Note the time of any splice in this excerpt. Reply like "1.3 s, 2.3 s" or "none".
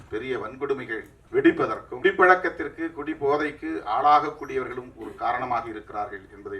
1.1 s, 1.9 s